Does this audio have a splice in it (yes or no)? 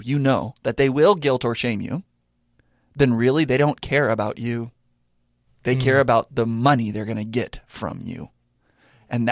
no